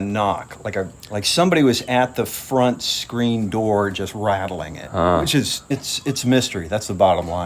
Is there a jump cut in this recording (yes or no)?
yes